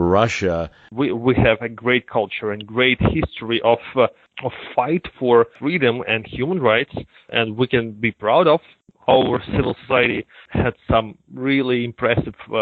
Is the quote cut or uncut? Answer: cut